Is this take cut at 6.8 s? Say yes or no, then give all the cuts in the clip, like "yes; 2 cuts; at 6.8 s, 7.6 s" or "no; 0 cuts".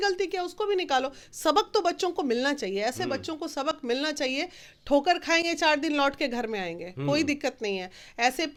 no; 0 cuts